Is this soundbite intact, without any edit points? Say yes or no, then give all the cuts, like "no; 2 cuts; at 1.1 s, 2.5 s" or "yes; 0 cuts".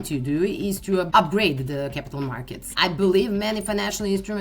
no; 2 cuts; at 1.1 s, 2.7 s